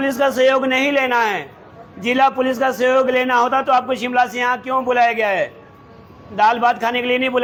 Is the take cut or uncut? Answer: uncut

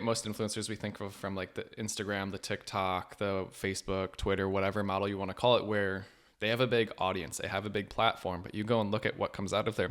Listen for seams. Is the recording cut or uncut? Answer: uncut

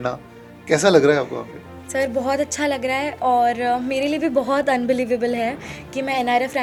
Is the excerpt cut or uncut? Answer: uncut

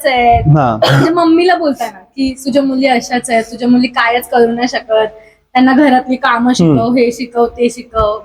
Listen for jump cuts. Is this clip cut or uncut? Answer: uncut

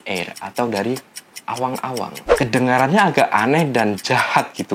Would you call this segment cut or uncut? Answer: cut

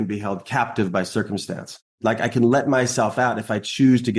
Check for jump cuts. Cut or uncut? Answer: cut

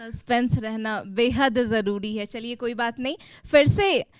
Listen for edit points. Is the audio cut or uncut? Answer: uncut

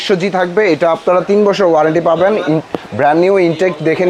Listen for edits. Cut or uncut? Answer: uncut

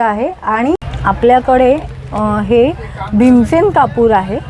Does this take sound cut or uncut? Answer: cut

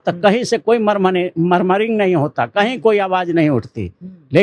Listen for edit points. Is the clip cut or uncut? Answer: uncut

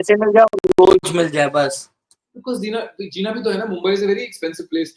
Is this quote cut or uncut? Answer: uncut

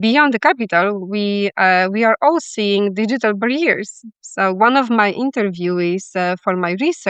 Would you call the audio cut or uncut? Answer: uncut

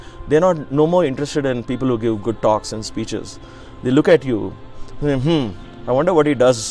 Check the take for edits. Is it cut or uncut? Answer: uncut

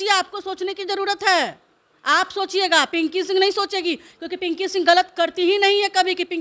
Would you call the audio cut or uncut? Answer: uncut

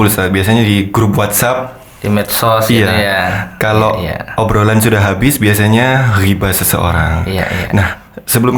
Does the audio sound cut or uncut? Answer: uncut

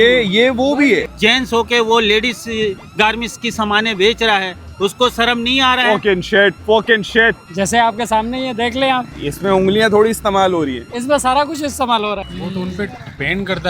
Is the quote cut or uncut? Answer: cut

